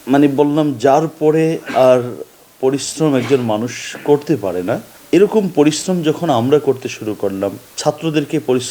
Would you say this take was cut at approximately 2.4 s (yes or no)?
no